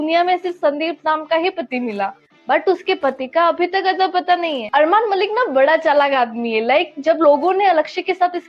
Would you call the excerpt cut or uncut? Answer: uncut